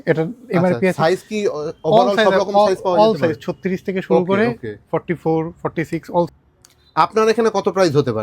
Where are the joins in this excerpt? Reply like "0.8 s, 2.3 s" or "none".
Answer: 6.3 s